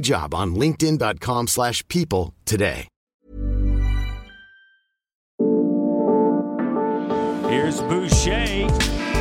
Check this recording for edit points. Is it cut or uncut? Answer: cut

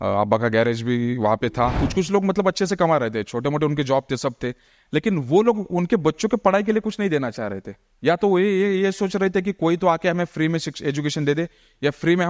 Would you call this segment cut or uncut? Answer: cut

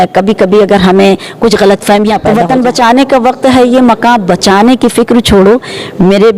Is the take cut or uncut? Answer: cut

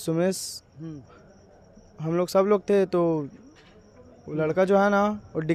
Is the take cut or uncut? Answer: uncut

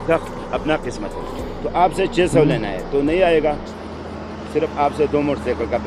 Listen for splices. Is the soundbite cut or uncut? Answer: uncut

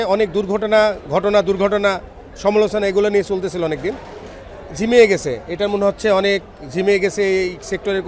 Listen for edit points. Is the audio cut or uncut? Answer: uncut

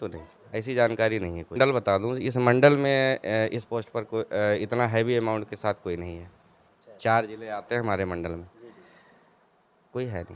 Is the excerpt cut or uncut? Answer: cut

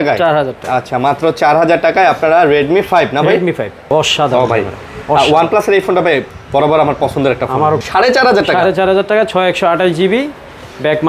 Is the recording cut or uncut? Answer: cut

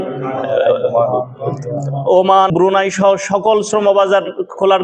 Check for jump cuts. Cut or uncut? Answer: cut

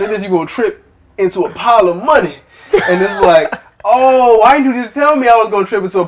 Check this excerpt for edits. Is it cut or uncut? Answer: uncut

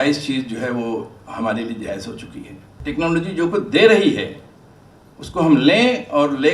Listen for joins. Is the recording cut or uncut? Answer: cut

